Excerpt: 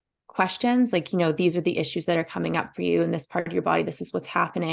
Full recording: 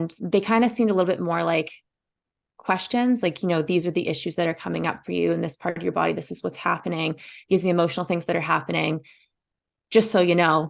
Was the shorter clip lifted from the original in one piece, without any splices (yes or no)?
yes